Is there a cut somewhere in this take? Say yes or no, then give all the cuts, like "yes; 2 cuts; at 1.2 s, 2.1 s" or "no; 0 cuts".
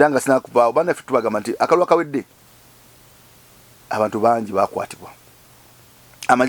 no; 0 cuts